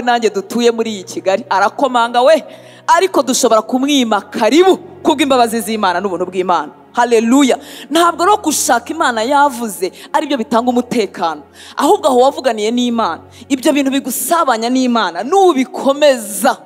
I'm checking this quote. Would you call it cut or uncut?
uncut